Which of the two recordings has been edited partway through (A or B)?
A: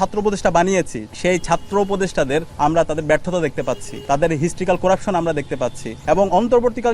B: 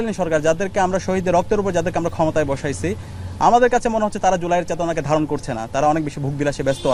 A